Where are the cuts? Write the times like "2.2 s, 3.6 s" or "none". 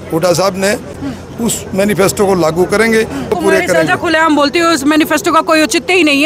1.0 s, 3.3 s